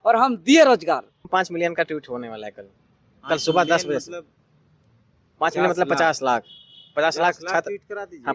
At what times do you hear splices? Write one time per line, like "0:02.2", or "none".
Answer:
0:01.2